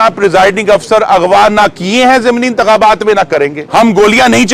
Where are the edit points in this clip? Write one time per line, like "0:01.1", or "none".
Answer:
0:03.6